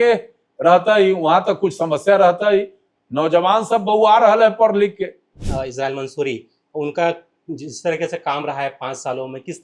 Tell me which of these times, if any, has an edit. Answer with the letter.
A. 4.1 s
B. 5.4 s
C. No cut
B